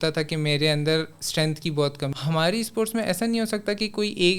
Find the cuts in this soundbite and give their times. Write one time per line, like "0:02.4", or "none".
0:02.1